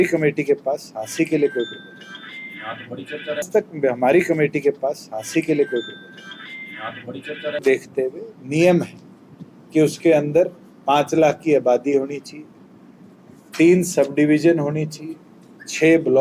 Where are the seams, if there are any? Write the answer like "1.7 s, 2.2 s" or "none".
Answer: 3.5 s, 7.6 s